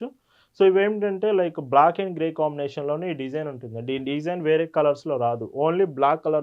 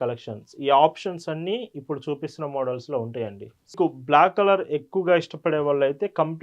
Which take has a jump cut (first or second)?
second